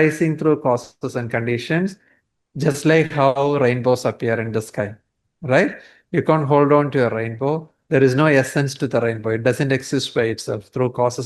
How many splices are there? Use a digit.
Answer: 0